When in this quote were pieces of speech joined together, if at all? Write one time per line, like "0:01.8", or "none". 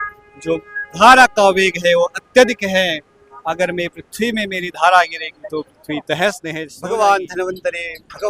0:06.7